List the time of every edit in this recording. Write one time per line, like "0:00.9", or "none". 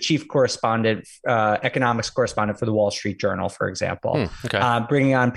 none